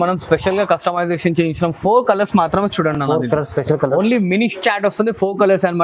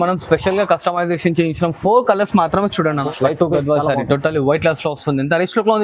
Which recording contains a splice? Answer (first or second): second